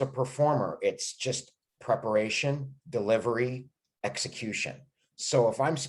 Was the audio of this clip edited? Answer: no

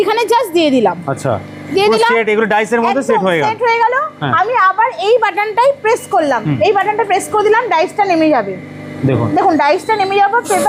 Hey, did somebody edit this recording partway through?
no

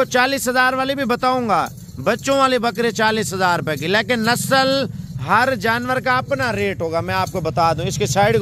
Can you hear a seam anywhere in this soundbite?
no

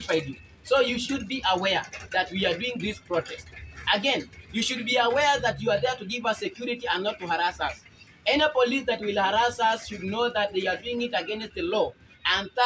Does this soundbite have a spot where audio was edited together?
no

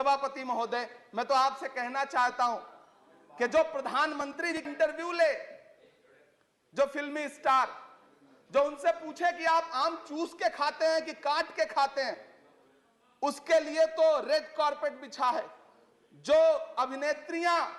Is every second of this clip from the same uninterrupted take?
no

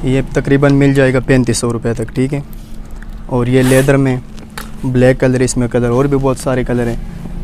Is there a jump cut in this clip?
no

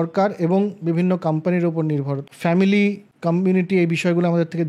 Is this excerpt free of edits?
no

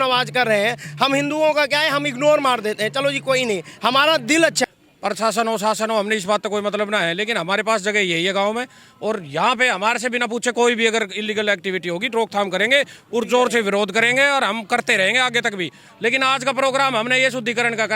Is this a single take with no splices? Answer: no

